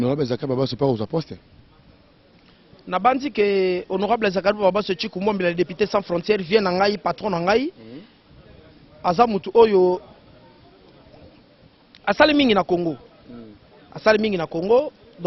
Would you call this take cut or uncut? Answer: uncut